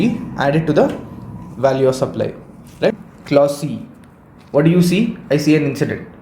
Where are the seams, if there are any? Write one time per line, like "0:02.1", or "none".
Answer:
0:02.9